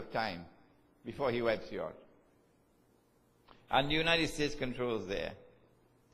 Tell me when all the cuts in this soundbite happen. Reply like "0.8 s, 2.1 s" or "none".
3.8 s